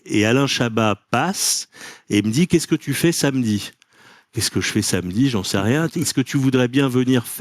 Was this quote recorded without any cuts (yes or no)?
yes